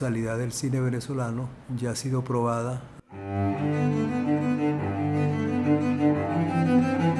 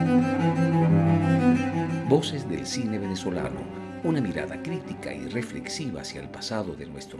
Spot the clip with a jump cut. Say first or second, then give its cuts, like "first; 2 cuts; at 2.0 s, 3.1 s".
first; 1 cut; at 3.1 s